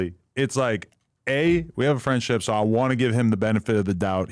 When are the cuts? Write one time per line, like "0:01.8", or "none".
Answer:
none